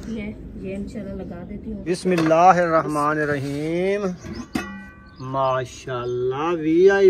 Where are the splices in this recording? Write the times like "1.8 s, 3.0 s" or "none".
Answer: 1.8 s